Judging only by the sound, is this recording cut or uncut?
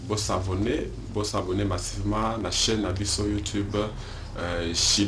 cut